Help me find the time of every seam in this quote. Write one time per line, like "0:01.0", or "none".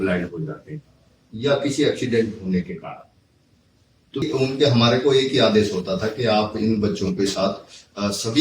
0:04.2